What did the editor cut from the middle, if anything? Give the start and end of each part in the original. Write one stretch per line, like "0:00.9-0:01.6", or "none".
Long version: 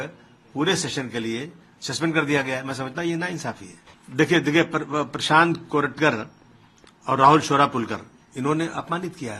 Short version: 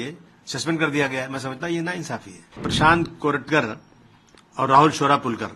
0:04.0-0:05.2